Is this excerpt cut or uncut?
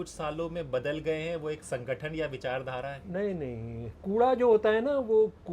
cut